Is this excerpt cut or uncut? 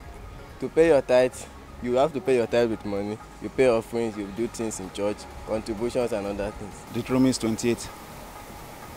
uncut